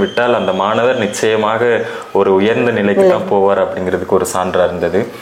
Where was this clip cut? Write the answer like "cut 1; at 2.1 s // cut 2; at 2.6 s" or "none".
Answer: none